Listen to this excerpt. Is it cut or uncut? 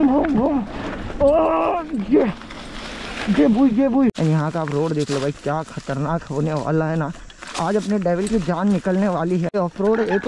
cut